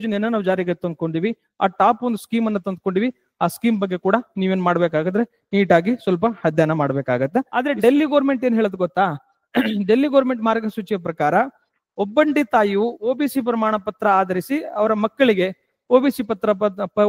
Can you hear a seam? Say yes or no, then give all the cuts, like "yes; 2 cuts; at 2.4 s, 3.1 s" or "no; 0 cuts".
yes; 1 cut; at 7.5 s